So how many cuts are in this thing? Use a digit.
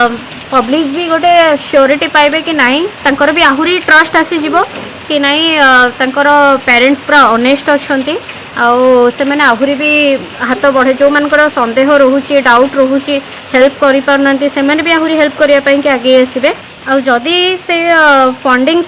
1